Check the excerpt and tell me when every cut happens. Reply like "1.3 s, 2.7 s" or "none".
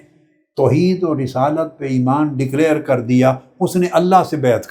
none

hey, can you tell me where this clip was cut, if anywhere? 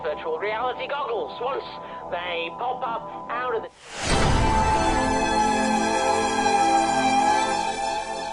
3.7 s

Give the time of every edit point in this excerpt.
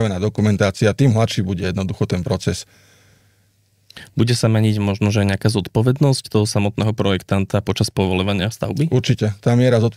none

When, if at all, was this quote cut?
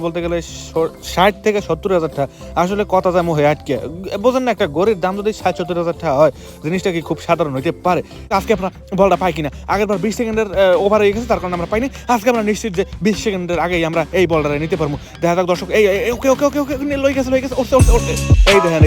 8.3 s

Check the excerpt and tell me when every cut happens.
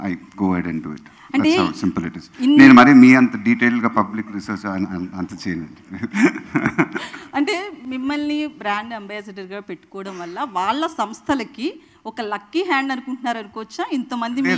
none

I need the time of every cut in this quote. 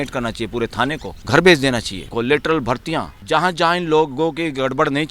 1.1 s, 2.1 s, 3.1 s

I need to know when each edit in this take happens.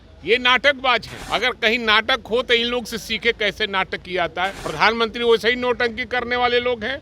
1.2 s, 4.6 s

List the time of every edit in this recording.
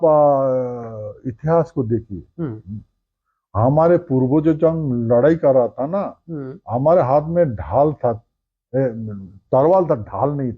none

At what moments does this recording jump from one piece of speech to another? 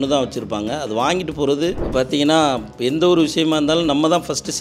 1.8 s

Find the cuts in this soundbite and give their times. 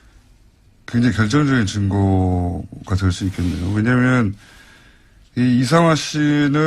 none

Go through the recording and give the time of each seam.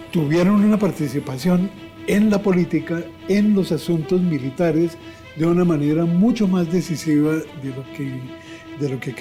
none

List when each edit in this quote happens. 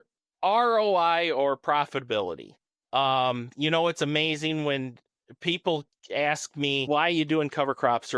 6.8 s

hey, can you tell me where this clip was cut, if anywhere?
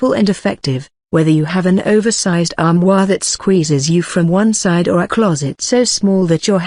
none

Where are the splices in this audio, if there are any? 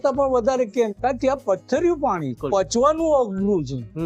0.9 s, 2.4 s

